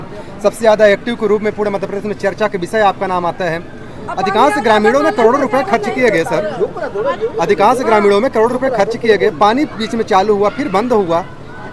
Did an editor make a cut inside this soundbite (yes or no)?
no